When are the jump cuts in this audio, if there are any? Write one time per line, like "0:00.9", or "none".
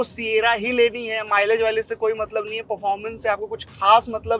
none